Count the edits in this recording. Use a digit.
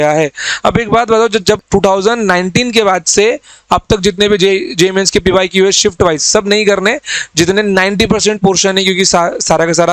1